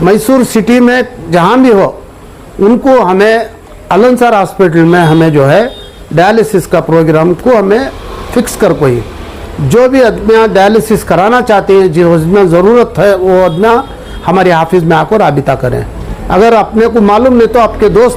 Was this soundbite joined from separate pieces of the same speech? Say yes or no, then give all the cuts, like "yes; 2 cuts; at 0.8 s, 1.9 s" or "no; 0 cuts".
no; 0 cuts